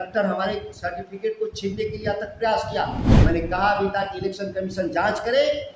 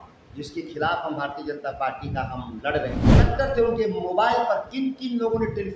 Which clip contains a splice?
second; 1 cut; at 3.3 s

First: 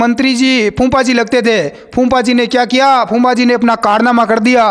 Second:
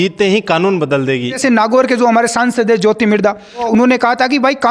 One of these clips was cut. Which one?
second; 2 cuts; at 1.4 s, 3.7 s

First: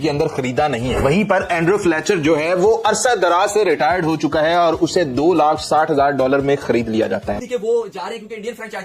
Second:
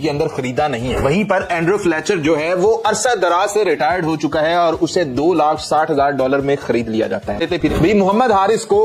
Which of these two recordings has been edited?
first; 1 cut; at 7.3 s

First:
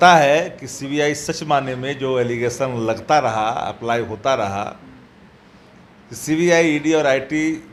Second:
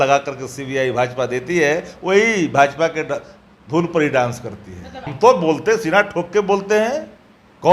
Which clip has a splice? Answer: second; 1 cut; at 5.1 s

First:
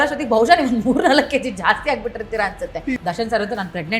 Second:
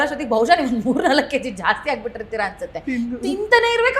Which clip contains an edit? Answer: first; 1 cut; at 3.0 s

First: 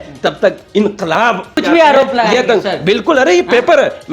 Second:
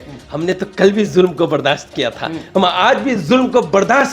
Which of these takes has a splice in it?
first; 1 cut; at 1.6 s

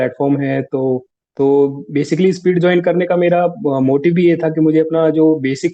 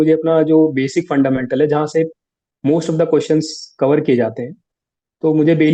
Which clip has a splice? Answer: first; 1 cut; at 1.2 s

